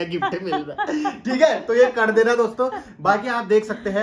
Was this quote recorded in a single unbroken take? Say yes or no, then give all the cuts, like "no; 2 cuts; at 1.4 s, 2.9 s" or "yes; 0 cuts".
yes; 0 cuts